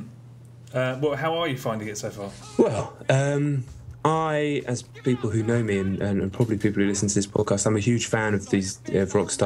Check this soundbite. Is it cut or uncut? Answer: uncut